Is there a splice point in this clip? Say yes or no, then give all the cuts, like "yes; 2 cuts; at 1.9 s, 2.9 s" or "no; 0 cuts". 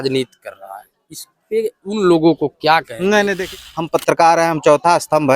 yes; 1 cut; at 3.4 s